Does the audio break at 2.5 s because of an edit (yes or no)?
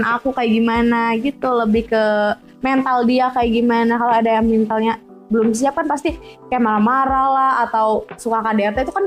no